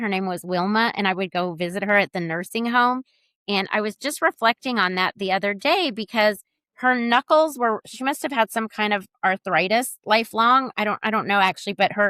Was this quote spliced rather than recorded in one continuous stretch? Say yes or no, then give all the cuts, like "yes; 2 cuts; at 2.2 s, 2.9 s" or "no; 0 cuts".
no; 0 cuts